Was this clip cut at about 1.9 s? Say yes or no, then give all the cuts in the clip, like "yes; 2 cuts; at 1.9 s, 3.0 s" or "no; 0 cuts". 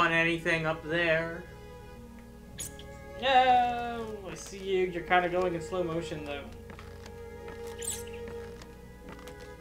no; 0 cuts